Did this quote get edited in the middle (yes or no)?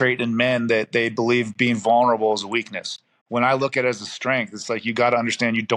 no